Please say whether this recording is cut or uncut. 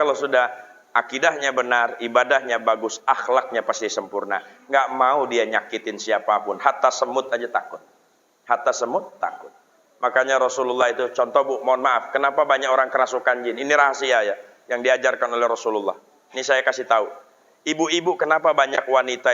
uncut